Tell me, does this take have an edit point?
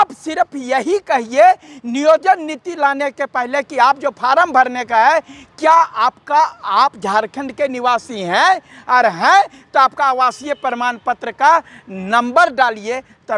no; 0 cuts

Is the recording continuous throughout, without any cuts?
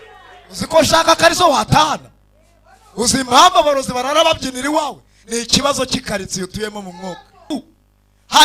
no; 1 cut; at 7.5 s

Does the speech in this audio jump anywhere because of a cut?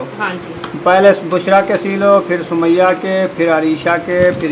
no; 0 cuts

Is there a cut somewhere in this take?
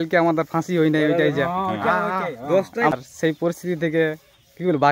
yes; 1 cut; at 2.9 s

